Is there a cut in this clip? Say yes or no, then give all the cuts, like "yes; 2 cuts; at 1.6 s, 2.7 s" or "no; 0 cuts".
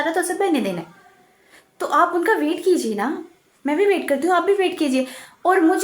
no; 0 cuts